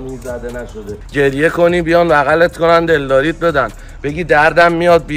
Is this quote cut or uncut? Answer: cut